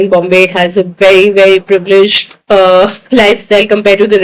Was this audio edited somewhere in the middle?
no; 0 cuts

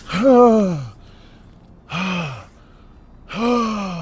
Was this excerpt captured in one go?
yes; 0 cuts

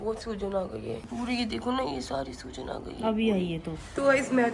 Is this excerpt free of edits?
yes; 0 cuts

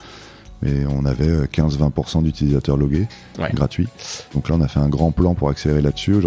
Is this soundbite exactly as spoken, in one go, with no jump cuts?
no; 1 cut; at 4.3 s

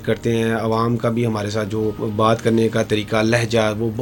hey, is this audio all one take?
no; 1 cut; at 2.0 s

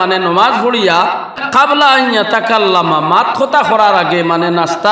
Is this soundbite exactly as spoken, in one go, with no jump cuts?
no; 1 cut; at 1.4 s

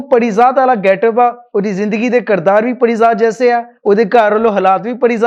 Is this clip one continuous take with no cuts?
yes; 0 cuts

